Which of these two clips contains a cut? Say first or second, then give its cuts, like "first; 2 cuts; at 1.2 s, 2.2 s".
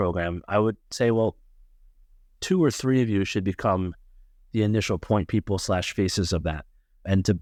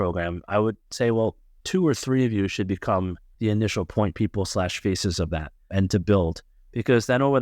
second; 3 cuts; at 1.5 s, 3.2 s, 5.6 s